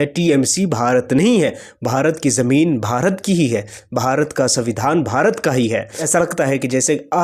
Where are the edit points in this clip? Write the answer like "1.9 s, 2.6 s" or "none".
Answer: 6.1 s